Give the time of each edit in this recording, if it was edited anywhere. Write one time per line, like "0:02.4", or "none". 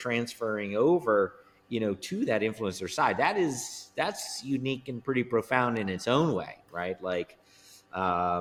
none